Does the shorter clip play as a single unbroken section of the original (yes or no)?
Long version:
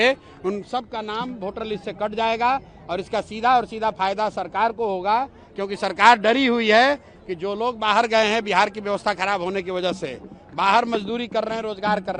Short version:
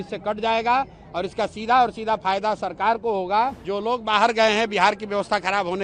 no